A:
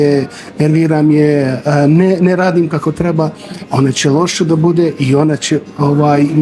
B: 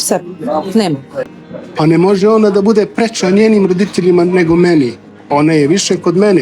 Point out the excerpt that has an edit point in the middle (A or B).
B